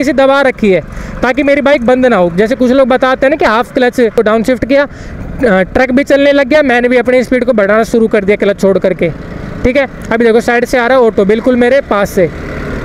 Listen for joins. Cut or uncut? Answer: cut